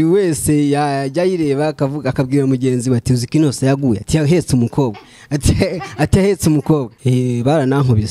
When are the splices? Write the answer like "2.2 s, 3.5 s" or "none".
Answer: 7.0 s